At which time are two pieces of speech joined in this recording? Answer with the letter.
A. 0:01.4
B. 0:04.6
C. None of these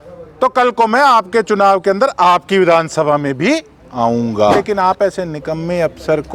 B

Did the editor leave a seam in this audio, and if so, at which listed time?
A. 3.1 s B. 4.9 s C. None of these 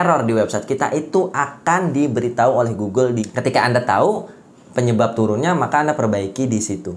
A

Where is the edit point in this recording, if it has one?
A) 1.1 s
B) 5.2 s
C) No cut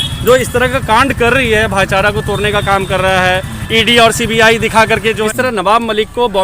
B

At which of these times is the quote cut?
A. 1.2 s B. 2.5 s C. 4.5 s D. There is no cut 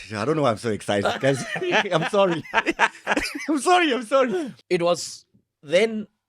C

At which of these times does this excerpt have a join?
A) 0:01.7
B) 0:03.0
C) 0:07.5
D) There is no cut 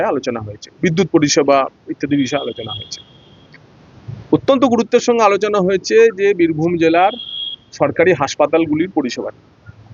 D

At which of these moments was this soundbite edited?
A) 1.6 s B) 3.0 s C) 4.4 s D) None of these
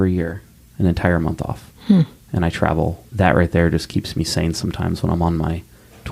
B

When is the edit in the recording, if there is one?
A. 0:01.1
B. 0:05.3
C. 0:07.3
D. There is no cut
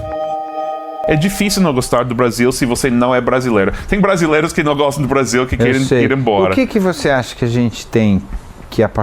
A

